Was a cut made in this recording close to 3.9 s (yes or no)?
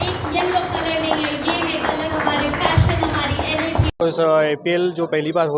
yes